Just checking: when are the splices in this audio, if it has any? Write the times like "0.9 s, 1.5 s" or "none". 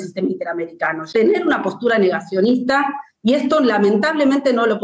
1.0 s